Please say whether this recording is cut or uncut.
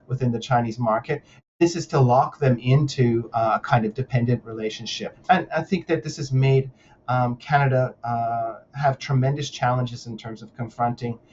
cut